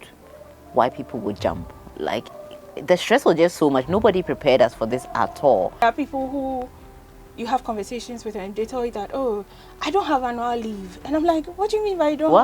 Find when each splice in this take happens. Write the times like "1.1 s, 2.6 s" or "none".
6.2 s